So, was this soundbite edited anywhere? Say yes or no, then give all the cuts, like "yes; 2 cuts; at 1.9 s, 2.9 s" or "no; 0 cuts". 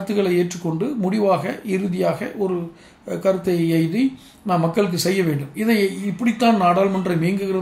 no; 0 cuts